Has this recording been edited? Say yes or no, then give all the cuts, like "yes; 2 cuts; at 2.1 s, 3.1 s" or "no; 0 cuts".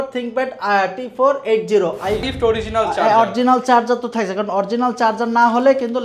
yes; 1 cut; at 2.2 s